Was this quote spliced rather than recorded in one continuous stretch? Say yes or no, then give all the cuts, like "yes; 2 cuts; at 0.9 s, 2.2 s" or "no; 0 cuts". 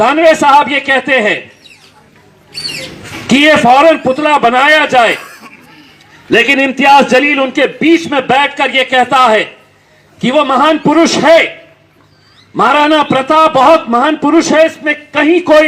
no; 0 cuts